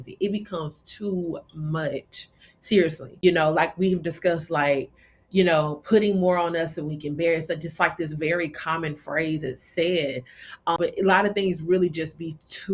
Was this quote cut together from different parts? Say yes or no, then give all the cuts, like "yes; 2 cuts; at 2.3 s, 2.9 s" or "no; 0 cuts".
yes; 2 cuts; at 3.1 s, 10.8 s